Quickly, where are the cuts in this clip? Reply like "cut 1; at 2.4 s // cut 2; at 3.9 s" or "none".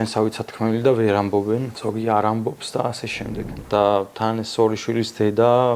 cut 1; at 1.7 s // cut 2; at 3.6 s